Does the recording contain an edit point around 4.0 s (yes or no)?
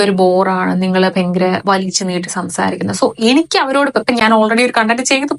no